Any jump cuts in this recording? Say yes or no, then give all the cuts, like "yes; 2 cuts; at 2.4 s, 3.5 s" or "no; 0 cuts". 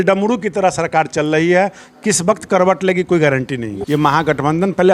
yes; 1 cut; at 3.7 s